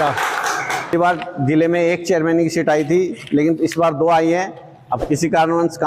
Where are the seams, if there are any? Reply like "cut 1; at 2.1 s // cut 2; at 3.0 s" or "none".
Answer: cut 1; at 0.9 s

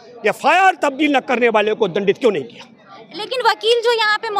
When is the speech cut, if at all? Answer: none

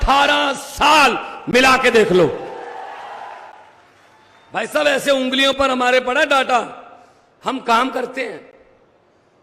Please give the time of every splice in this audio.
cut 1; at 3.5 s

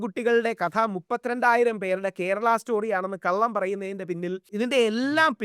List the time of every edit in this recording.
cut 1; at 4.5 s

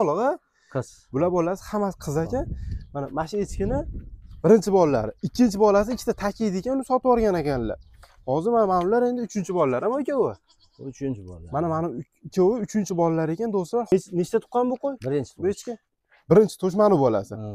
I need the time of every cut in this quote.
cut 1; at 13.9 s

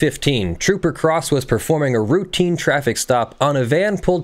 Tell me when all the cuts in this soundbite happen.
none

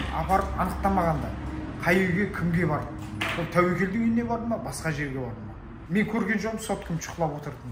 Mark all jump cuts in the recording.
none

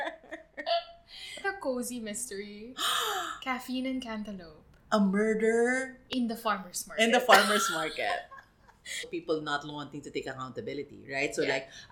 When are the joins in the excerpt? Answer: cut 1; at 1.4 s // cut 2; at 9.1 s

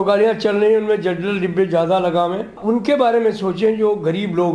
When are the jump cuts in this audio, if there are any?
cut 1; at 2.6 s

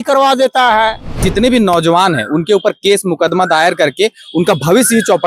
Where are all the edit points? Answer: cut 1; at 1.2 s

